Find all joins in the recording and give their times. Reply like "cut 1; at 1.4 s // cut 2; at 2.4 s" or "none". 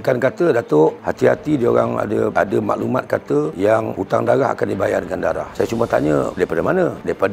none